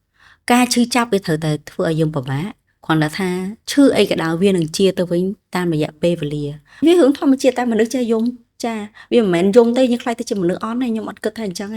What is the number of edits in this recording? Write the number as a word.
one